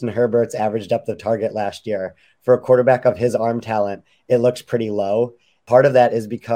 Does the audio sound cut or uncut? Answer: cut